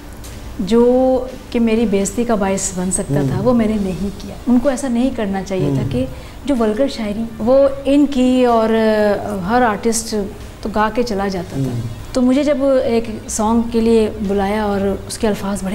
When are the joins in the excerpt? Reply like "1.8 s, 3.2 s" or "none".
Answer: 4.3 s, 7.3 s, 11.9 s